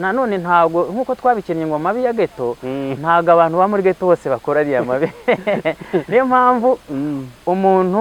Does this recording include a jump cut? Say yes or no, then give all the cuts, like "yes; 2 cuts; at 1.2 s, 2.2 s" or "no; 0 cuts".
no; 0 cuts